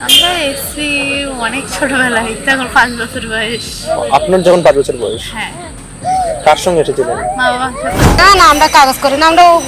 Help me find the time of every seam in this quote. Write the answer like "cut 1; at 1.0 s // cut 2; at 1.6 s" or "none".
cut 1; at 8.2 s